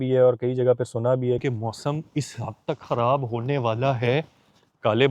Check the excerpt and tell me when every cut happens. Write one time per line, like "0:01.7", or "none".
0:01.4